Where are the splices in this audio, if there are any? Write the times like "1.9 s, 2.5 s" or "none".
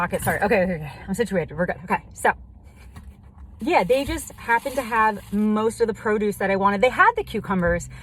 none